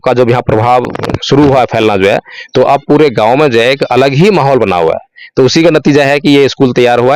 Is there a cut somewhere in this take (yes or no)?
yes